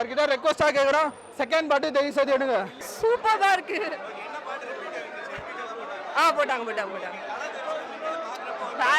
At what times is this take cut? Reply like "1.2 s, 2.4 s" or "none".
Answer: 2.8 s